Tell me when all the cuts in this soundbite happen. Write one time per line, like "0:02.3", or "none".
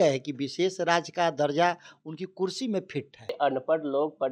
0:03.3

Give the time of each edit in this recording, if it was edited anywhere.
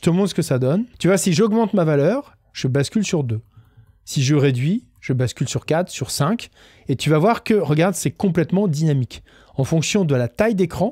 0:00.9

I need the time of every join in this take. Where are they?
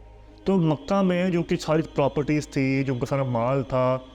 none

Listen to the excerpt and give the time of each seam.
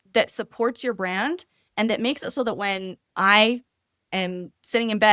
none

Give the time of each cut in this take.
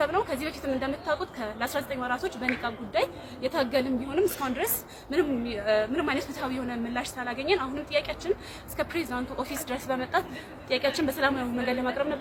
none

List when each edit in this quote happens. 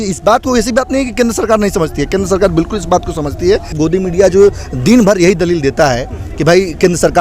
0:03.7

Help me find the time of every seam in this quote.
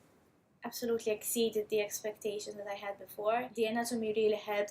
0:03.5

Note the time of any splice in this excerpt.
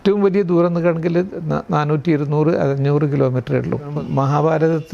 0:03.9

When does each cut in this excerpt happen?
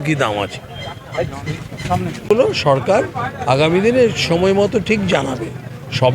0:02.3

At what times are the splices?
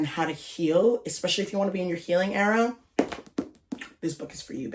none

